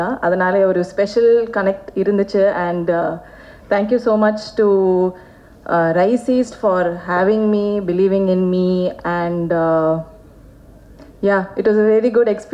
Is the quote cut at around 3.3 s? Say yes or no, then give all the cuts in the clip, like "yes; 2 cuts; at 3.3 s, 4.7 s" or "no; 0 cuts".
no; 0 cuts